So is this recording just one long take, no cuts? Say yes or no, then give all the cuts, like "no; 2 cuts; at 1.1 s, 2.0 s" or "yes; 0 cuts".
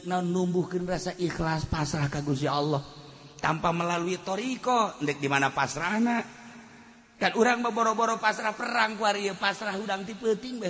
yes; 0 cuts